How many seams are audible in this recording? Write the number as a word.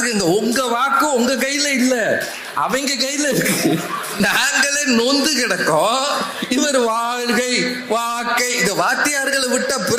one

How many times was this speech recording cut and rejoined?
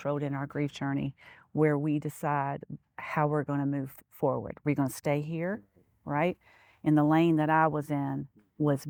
zero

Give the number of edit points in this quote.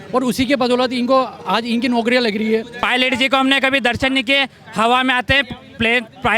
one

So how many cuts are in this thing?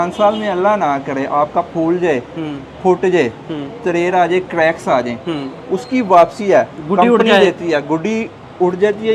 zero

